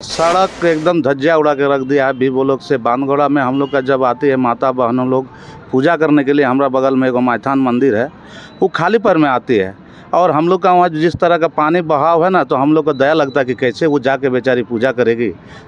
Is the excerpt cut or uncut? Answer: uncut